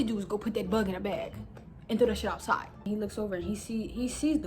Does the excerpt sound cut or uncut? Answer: cut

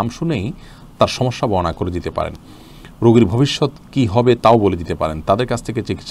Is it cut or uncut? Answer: uncut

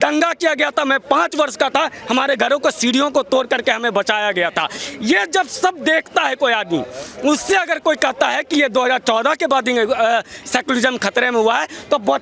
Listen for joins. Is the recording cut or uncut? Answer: uncut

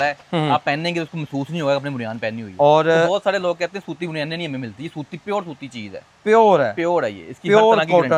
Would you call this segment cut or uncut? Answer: uncut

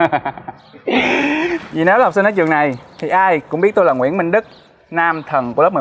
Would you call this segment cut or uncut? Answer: cut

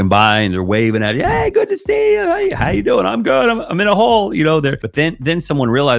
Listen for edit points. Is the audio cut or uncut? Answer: cut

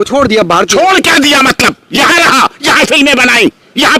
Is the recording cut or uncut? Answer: uncut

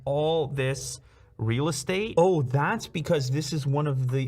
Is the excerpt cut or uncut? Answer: cut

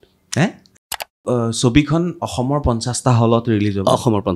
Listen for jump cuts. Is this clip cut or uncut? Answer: cut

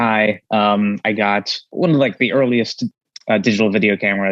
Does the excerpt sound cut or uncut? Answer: cut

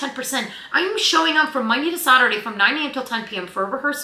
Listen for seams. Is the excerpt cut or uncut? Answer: uncut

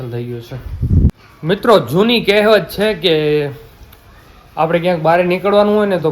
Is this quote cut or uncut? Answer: cut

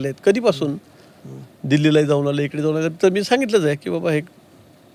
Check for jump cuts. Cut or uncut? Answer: uncut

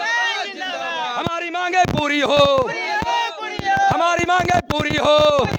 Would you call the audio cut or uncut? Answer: uncut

